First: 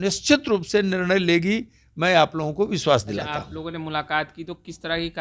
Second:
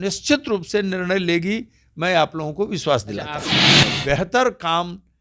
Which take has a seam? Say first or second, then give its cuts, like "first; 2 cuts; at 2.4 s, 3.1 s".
second; 1 cut; at 3.6 s